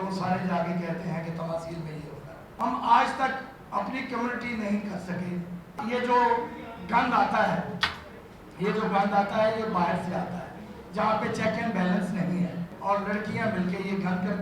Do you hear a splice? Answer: yes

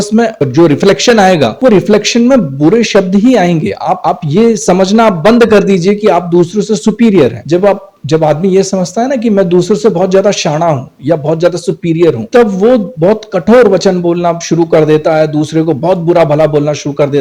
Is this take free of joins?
yes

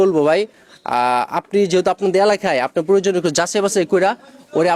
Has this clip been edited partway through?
no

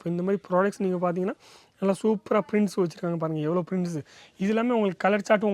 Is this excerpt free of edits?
yes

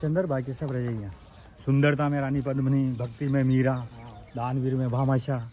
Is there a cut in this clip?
no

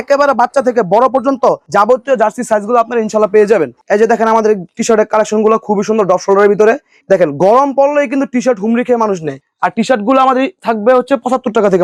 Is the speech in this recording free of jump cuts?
yes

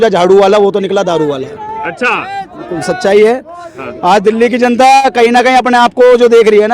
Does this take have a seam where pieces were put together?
no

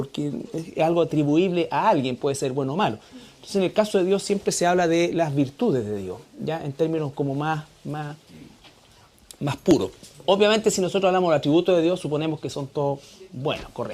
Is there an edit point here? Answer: yes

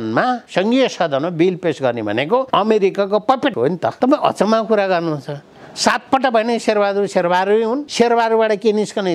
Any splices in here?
yes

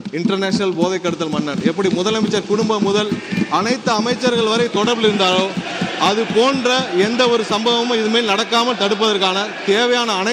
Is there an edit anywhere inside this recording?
no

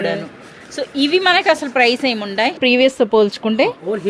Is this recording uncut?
no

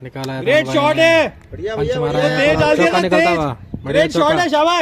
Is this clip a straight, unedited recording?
yes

